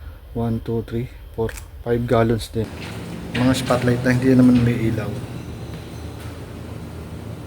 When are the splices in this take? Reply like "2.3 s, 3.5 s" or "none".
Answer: 2.4 s